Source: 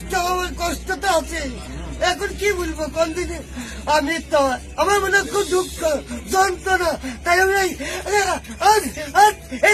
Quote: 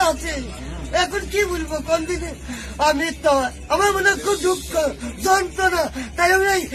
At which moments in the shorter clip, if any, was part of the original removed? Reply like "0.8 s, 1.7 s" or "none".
none